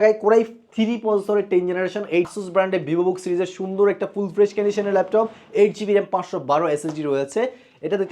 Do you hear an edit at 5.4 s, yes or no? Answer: no